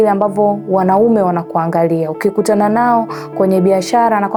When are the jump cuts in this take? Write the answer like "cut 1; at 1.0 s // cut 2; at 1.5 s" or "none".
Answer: none